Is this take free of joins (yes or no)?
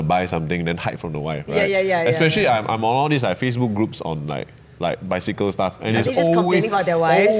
yes